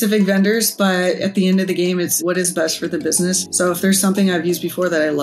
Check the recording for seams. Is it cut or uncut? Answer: cut